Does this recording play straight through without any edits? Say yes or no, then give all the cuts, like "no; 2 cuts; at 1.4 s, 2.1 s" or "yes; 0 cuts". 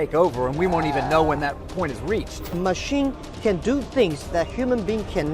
no; 1 cut; at 2.6 s